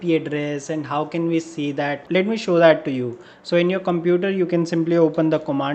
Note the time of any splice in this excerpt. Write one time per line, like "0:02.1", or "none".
none